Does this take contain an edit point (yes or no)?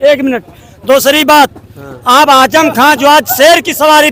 no